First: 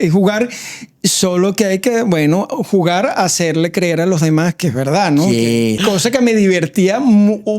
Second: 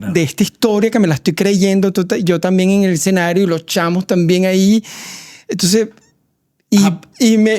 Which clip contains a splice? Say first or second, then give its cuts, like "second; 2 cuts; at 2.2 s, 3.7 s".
first; 1 cut; at 5.8 s